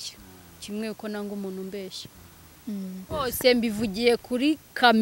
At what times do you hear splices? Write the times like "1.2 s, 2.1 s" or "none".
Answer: 3.1 s

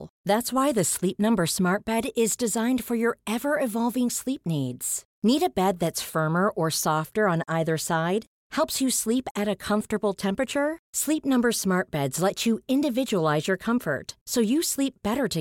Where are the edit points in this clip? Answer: none

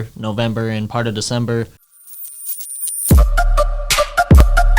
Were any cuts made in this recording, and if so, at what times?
1.8 s

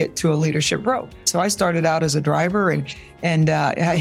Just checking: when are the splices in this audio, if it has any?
1.3 s

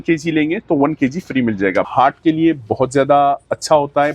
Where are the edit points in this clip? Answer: 1.9 s

